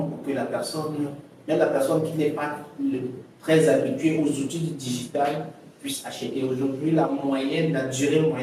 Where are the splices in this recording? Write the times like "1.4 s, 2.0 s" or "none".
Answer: none